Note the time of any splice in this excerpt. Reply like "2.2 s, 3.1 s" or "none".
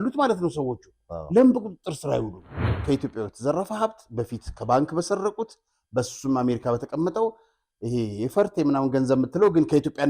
2.7 s